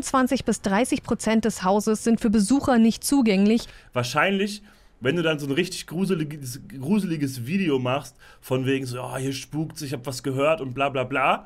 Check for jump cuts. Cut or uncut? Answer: uncut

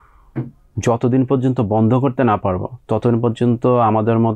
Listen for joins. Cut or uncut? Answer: uncut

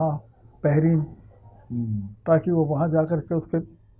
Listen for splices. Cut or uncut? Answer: uncut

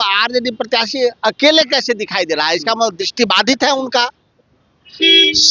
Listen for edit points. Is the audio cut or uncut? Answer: uncut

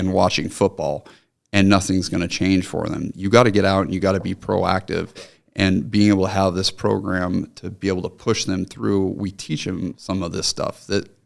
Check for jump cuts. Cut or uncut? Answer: uncut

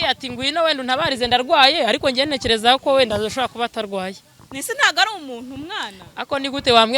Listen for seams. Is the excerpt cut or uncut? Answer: uncut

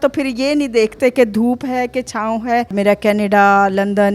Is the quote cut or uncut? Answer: cut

